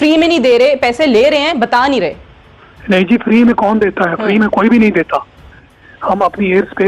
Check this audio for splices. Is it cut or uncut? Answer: cut